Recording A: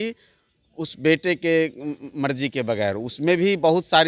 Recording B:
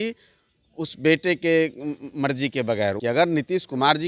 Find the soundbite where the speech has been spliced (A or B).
B